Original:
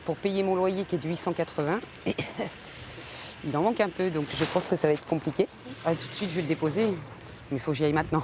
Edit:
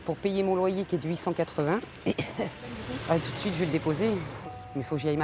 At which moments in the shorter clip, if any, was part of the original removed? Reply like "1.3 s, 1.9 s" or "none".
2.9 s